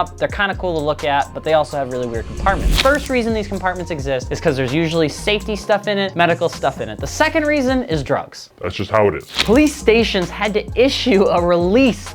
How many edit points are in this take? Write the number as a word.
two